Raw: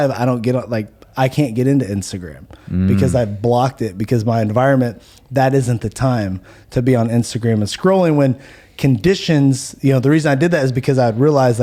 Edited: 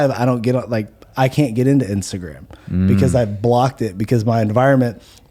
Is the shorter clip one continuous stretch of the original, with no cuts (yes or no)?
yes